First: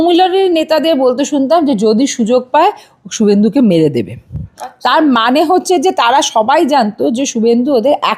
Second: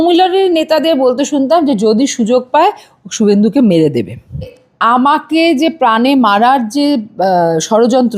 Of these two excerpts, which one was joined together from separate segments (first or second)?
second